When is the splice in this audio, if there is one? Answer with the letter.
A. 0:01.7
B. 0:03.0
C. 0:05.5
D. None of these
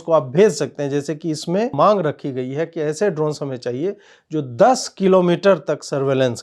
A